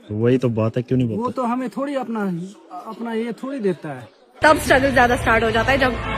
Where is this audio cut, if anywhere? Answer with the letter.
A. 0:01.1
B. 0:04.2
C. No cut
B